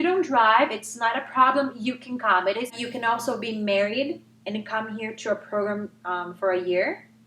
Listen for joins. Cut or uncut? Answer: cut